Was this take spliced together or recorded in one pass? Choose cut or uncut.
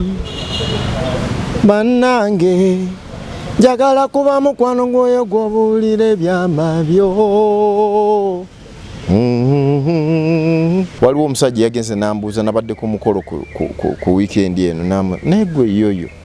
cut